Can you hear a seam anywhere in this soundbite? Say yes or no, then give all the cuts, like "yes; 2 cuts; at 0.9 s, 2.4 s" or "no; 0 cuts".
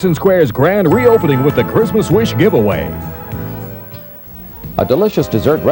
yes; 1 cut; at 4.1 s